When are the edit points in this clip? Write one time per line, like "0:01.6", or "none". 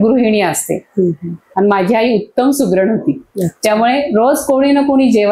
0:01.5